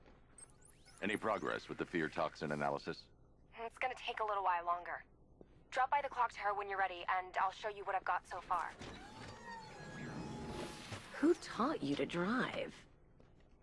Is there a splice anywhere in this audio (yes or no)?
yes